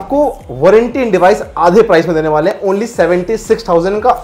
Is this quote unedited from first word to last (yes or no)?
yes